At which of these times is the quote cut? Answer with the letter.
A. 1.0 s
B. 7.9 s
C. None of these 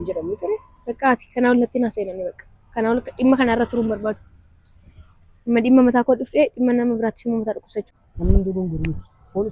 B